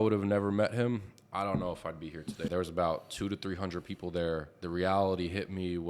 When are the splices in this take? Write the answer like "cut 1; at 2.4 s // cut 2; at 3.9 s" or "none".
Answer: cut 1; at 2.5 s // cut 2; at 4.5 s